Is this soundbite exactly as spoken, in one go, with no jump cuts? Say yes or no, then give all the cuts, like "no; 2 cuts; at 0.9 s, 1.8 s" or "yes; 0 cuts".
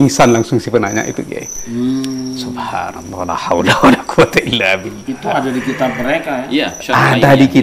yes; 0 cuts